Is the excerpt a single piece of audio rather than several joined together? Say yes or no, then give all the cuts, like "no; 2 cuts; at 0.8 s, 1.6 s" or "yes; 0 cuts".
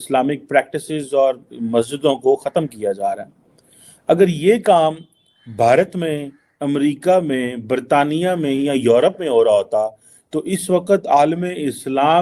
yes; 0 cuts